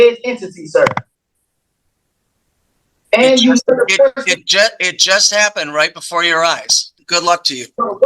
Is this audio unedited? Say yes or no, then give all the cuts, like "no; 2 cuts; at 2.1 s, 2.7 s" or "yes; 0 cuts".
no; 1 cut; at 6.9 s